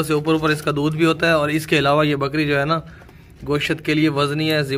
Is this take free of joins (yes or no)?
yes